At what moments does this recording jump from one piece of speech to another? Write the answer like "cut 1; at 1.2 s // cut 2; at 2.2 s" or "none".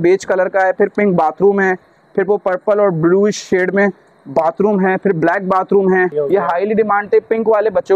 cut 1; at 6.1 s